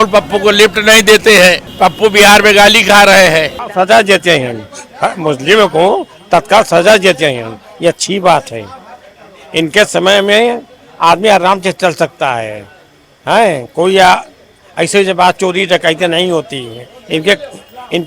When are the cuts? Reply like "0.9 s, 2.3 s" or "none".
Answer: 1.7 s, 3.7 s